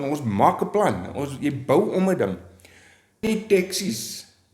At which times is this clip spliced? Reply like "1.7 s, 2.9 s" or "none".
3.2 s